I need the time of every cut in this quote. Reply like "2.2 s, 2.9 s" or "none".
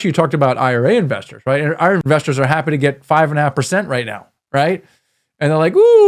2.0 s